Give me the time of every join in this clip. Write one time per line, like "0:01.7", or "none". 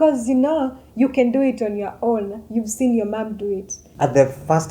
0:03.8

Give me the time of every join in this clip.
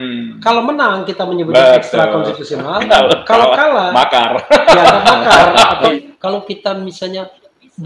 0:05.9

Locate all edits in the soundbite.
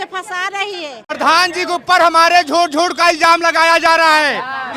0:01.1

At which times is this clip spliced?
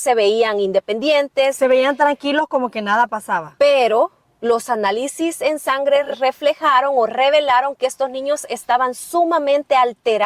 0:06.1

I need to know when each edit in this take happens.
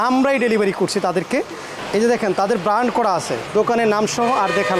none

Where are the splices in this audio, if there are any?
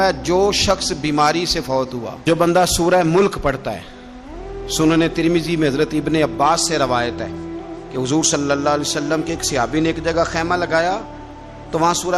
0:02.2

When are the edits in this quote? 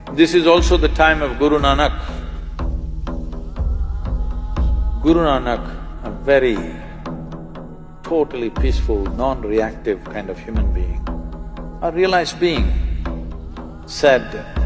none

